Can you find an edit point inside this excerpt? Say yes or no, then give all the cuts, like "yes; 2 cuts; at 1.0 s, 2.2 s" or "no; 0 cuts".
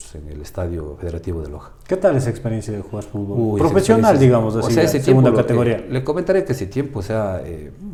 no; 0 cuts